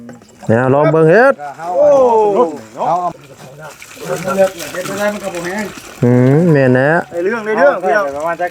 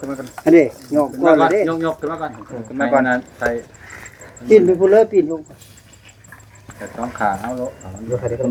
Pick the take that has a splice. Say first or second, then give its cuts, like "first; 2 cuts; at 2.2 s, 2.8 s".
first; 1 cut; at 3.1 s